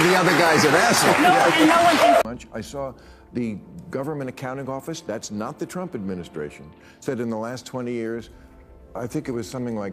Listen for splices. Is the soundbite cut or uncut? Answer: cut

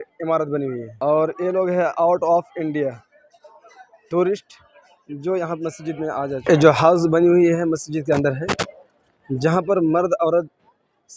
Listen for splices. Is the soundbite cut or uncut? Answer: cut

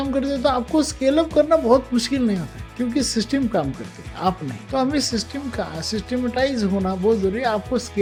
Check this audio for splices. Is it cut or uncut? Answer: uncut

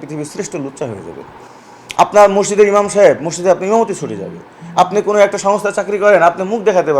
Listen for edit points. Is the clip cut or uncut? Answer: uncut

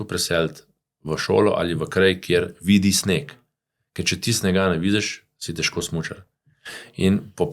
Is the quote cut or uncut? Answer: uncut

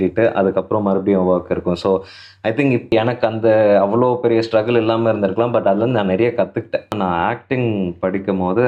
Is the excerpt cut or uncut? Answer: cut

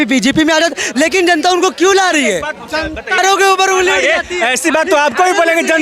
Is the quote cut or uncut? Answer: cut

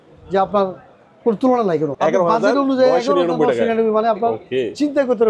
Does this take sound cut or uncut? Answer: cut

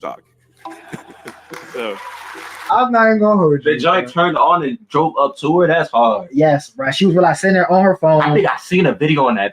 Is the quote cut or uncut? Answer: cut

